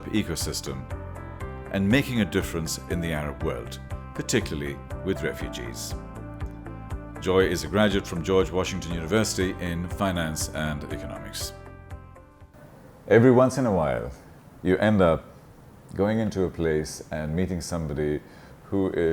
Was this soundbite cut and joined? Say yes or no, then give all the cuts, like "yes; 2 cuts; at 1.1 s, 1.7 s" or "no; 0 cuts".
yes; 1 cut; at 12.5 s